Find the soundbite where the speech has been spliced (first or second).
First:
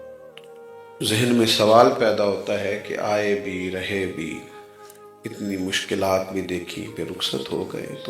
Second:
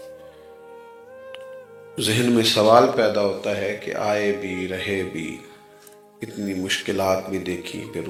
first